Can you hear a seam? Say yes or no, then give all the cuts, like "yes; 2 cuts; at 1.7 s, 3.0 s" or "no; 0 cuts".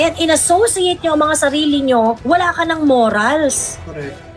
yes; 1 cut; at 2.2 s